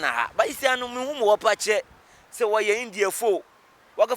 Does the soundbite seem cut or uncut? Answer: uncut